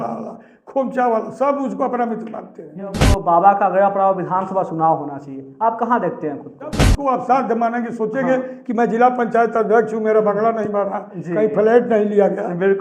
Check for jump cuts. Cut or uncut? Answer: cut